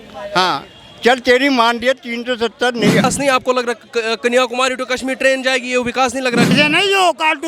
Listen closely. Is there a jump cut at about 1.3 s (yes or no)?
no